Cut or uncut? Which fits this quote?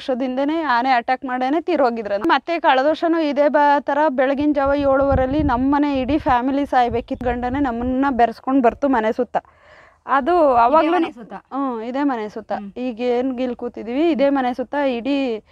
cut